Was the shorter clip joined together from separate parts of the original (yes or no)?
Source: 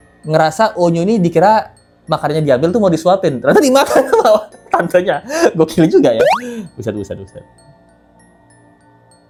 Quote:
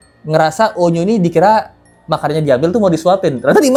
no